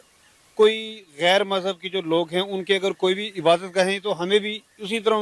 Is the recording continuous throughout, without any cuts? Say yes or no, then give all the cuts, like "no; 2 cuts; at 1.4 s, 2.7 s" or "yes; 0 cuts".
yes; 0 cuts